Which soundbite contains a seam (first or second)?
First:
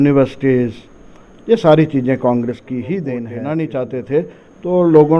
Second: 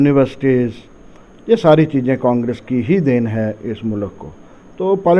first